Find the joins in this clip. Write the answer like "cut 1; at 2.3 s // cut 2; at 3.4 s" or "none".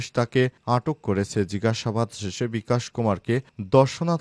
none